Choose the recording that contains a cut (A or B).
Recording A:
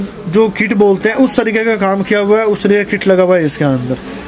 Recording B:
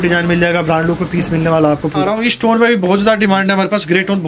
B